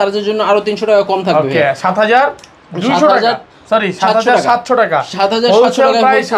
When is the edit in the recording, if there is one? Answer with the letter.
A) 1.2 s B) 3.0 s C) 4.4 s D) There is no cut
D